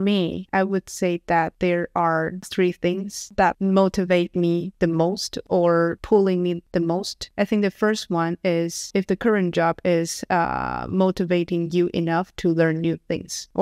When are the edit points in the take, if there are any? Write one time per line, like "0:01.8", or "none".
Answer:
none